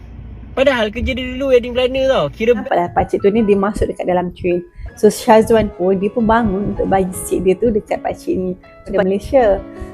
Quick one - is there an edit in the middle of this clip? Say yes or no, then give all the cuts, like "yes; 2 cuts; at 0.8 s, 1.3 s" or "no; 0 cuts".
yes; 2 cuts; at 2.6 s, 8.9 s